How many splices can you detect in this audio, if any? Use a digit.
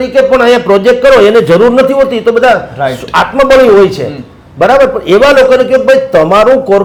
0